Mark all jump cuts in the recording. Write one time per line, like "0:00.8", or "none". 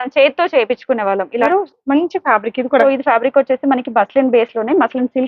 0:01.5
0:02.8